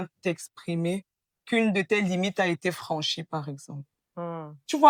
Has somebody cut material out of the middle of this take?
no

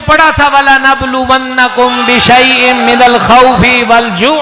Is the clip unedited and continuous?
yes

